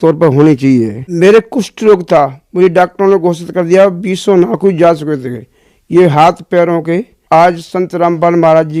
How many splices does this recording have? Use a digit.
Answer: 2